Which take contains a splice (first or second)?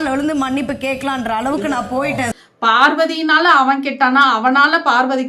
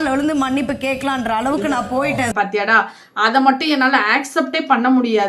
second